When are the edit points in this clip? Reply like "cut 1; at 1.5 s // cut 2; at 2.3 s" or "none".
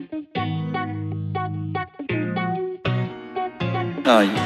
none